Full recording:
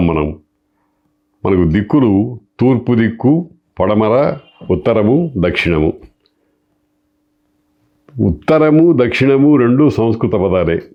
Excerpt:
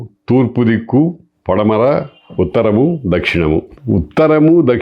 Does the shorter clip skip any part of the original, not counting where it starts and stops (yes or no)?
yes